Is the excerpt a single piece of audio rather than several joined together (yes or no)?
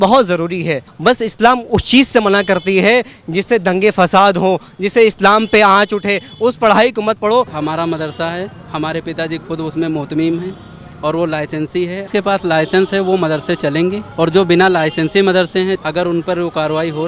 no